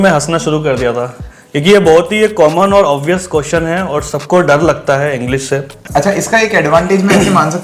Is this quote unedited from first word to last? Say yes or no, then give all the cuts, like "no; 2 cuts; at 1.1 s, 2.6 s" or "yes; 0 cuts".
no; 1 cut; at 5.8 s